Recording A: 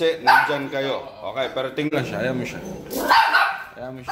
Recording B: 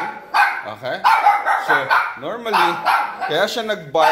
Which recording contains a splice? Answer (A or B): A